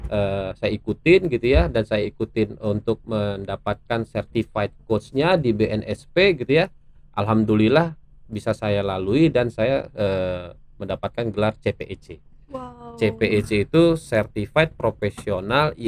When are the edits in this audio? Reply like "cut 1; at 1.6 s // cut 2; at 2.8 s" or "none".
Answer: none